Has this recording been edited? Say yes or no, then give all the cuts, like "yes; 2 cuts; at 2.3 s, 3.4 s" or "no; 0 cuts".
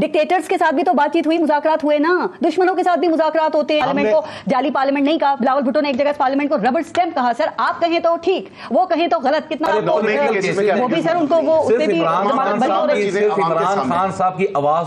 yes; 2 cuts; at 3.8 s, 9.7 s